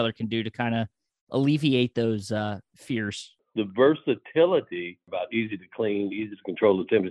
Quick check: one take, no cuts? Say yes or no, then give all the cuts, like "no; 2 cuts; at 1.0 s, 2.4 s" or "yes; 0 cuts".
no; 2 cuts; at 3.4 s, 5.1 s